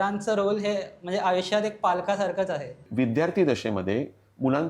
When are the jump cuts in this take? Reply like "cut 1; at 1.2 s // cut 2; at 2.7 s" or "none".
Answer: cut 1; at 2.9 s